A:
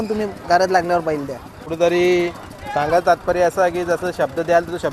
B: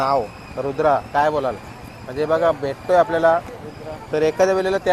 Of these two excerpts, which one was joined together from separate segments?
A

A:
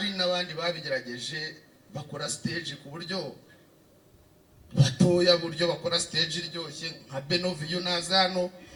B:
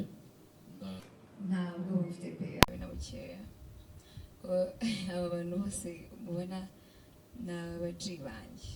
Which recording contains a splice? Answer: B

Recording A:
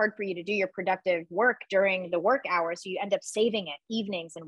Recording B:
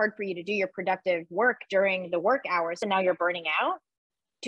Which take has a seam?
B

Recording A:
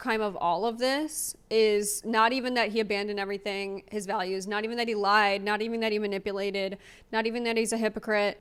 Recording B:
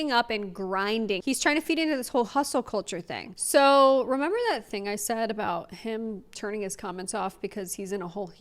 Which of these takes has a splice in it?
B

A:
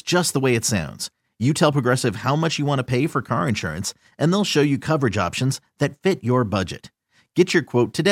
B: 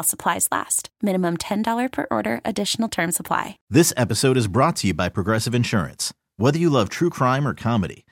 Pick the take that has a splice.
B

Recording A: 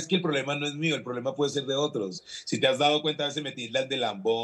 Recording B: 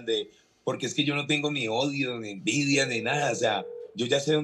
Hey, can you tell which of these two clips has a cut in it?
A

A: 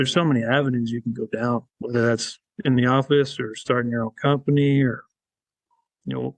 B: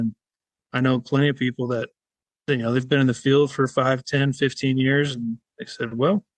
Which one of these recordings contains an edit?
A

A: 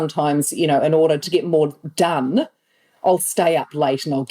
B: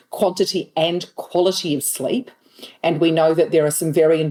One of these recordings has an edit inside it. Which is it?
A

